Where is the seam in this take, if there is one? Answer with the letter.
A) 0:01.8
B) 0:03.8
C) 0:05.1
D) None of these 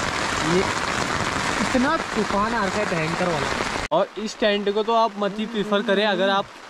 B